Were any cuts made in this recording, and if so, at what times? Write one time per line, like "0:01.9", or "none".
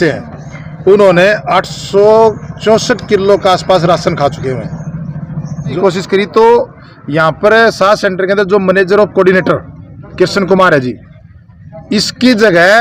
0:05.7